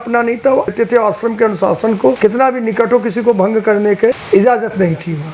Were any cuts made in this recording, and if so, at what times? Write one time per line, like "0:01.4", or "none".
0:00.7
0:02.2
0:04.2